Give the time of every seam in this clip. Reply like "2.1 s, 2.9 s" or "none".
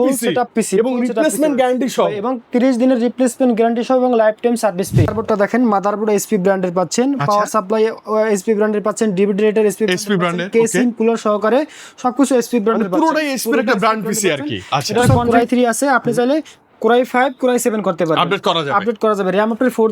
5.1 s, 15.2 s